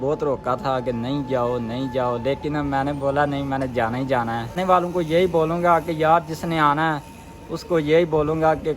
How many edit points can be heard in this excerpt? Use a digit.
1